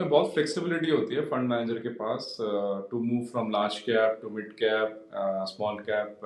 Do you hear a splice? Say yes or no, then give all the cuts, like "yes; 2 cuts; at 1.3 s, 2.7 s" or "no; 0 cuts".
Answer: no; 0 cuts